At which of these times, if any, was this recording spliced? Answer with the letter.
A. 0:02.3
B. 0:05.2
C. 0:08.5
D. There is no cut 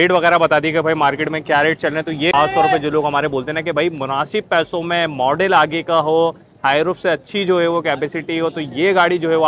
A